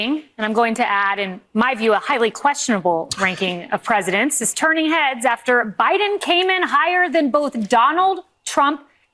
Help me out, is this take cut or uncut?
uncut